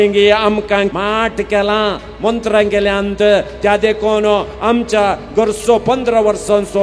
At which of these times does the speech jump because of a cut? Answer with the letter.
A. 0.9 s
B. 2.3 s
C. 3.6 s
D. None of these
A